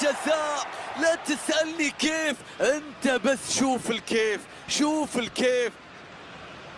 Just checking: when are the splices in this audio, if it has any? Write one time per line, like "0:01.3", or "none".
0:05.8